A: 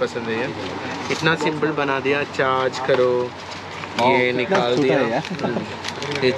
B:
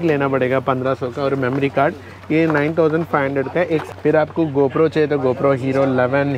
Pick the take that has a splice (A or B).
B